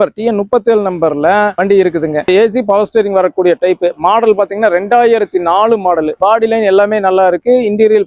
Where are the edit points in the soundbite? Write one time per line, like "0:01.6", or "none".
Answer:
none